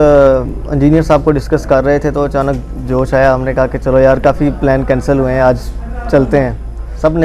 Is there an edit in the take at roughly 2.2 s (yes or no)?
no